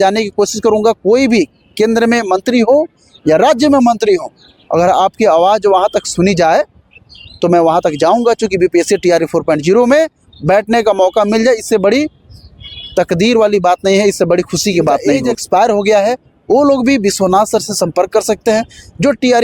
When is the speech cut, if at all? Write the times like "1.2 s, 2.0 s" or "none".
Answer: 15.3 s